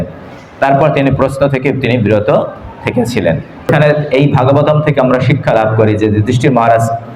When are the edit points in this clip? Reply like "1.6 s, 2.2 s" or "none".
3.7 s